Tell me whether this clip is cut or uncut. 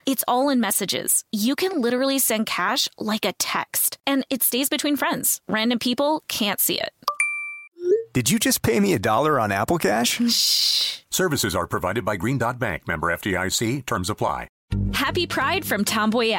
cut